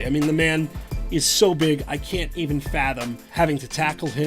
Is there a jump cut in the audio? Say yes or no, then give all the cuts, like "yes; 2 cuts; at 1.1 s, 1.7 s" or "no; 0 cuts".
yes; 1 cut; at 3.2 s